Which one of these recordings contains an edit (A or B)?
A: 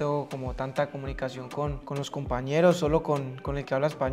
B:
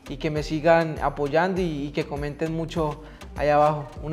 A